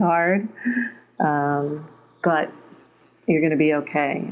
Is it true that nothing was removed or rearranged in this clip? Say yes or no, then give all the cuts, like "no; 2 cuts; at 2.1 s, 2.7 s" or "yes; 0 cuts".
yes; 0 cuts